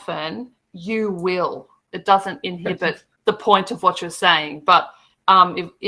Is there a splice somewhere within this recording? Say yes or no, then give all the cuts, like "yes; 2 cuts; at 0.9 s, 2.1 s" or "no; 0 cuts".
yes; 1 cut; at 1.9 s